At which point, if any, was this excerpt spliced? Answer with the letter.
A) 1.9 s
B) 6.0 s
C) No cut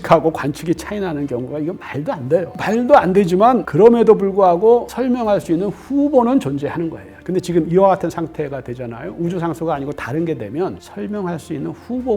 C